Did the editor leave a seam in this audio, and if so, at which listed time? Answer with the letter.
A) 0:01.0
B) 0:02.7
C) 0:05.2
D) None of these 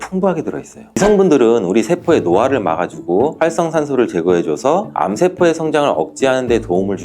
A